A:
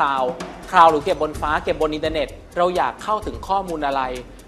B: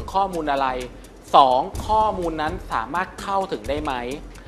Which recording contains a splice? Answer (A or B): A